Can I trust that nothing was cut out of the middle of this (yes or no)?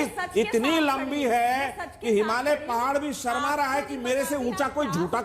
yes